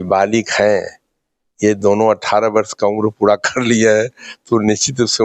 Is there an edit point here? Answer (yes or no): no